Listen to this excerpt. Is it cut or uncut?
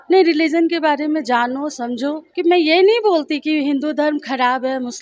cut